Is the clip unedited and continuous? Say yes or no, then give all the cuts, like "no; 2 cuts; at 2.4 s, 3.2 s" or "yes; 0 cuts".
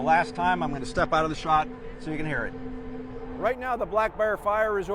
no; 1 cut; at 3.2 s